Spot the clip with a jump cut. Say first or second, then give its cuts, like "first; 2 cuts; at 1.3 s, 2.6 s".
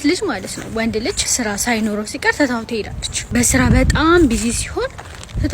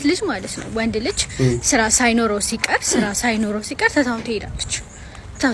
first; 2 cuts; at 1.3 s, 3.2 s